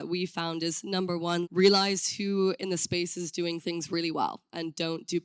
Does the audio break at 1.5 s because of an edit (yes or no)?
yes